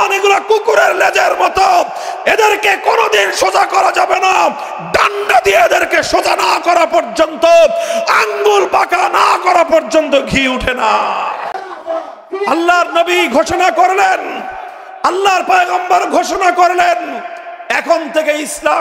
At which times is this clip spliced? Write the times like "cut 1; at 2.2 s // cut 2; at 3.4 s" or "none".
cut 1; at 11.5 s